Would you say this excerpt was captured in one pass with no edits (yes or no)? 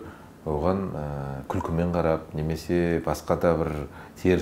yes